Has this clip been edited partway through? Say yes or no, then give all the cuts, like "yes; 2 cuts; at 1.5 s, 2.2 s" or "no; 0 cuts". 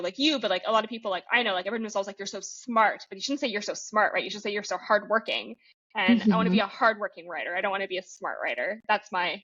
no; 0 cuts